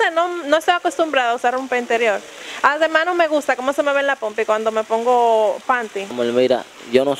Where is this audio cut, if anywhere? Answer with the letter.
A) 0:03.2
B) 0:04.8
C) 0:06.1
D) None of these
C